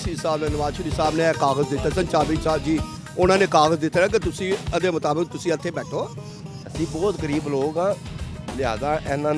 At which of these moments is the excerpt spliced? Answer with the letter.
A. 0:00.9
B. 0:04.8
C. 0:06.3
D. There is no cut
C